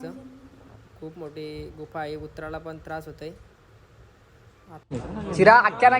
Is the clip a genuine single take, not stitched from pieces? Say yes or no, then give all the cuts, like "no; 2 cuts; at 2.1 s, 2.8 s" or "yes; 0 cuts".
no; 1 cut; at 4.9 s